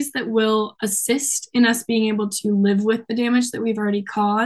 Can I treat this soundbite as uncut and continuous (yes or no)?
yes